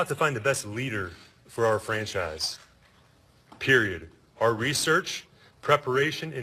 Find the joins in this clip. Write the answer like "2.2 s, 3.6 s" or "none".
4.0 s